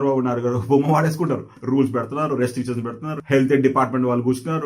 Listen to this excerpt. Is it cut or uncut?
cut